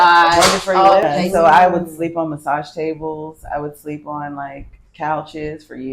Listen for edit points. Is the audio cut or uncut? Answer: cut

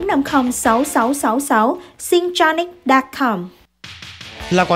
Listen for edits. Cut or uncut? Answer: cut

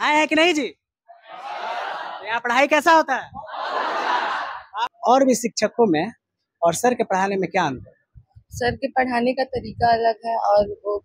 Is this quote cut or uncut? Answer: cut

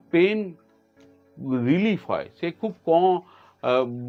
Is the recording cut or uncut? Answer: uncut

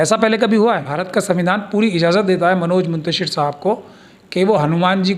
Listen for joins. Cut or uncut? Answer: cut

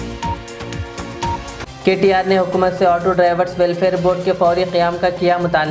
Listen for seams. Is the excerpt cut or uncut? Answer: uncut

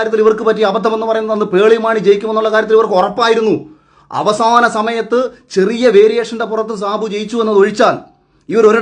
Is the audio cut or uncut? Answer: uncut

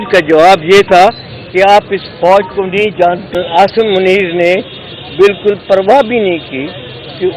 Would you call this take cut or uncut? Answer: cut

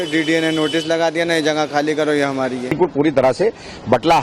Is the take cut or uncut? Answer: cut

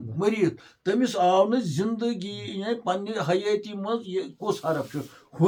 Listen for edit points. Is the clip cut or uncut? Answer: uncut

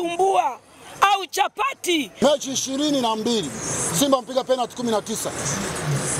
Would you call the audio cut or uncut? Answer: cut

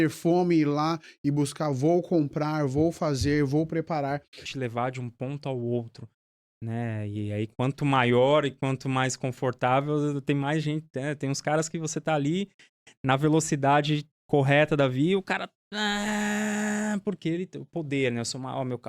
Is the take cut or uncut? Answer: cut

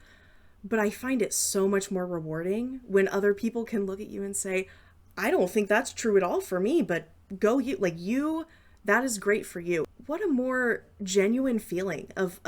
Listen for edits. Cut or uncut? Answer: cut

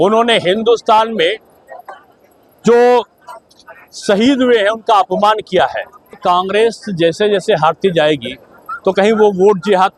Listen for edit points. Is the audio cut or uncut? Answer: cut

